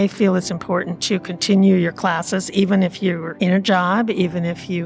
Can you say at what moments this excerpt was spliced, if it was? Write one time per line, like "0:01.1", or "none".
none